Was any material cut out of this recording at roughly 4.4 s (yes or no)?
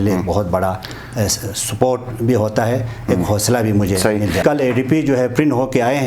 yes